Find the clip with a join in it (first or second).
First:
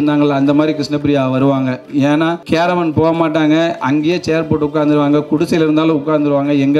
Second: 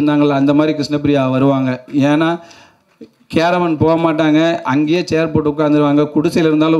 first